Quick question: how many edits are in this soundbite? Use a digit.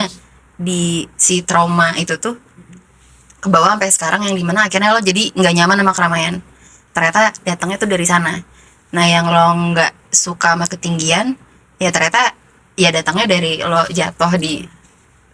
0